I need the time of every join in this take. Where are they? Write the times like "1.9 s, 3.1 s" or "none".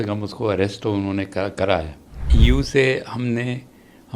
2.3 s